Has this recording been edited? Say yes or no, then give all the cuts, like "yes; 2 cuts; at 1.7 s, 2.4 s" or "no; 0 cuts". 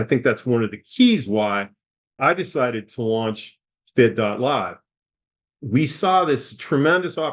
yes; 1 cut; at 2.2 s